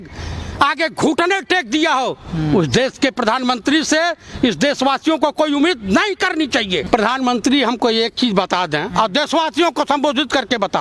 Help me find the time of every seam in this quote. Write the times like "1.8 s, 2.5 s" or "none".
6.8 s